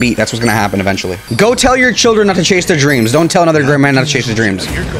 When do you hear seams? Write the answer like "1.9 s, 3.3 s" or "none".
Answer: 1.2 s